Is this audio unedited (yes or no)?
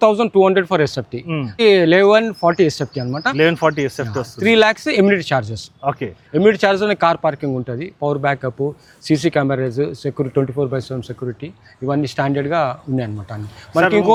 yes